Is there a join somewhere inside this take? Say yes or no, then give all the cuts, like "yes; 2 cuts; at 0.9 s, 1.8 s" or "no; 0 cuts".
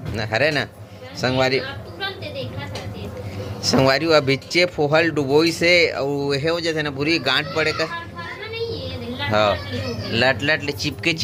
no; 0 cuts